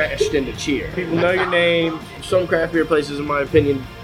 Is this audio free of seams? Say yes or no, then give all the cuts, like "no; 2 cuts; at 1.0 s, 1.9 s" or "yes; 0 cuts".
no; 2 cuts; at 1.0 s, 2.2 s